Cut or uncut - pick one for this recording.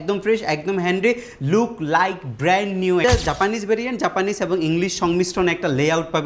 cut